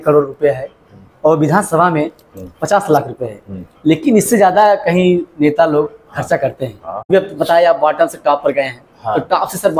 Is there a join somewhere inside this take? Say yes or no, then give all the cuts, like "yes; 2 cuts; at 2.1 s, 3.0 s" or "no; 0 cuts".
yes; 1 cut; at 7.1 s